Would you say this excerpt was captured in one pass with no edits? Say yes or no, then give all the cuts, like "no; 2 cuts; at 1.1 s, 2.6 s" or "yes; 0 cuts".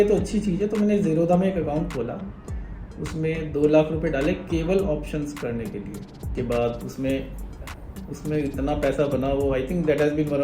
no; 1 cut; at 6.3 s